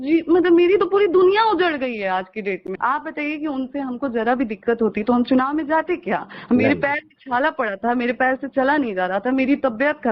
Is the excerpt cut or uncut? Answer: cut